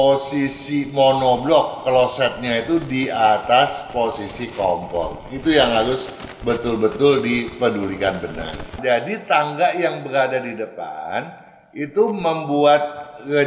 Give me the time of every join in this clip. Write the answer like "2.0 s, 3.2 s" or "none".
8.8 s